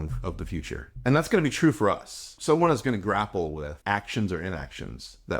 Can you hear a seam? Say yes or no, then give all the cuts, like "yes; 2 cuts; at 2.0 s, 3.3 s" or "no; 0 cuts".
yes; 3 cuts; at 0.9 s, 2.3 s, 3.7 s